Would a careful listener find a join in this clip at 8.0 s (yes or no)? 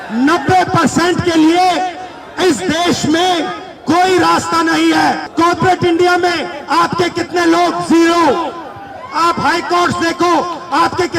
no